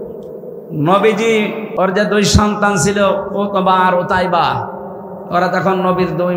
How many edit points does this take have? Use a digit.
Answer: 1